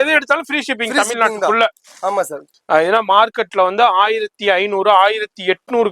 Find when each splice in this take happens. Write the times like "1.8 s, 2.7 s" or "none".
2.4 s